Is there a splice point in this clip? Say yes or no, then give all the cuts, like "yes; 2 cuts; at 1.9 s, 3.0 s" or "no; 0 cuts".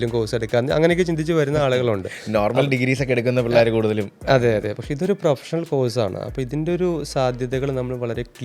no; 0 cuts